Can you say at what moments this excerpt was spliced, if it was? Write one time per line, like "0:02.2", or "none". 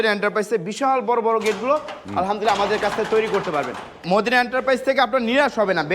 0:04.0